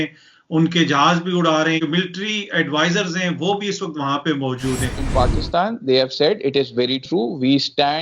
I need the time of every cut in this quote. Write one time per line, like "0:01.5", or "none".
0:01.8
0:05.0